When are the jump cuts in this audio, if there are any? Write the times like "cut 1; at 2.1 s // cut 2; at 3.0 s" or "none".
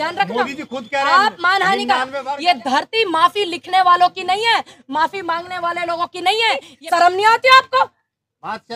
cut 1; at 2.2 s // cut 2; at 6.7 s